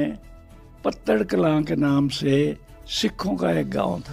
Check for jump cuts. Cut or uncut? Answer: uncut